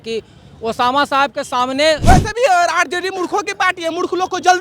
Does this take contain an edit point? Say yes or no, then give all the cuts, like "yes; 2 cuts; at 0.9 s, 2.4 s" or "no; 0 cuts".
yes; 1 cut; at 2.0 s